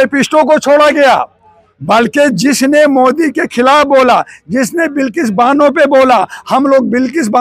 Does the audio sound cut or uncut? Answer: uncut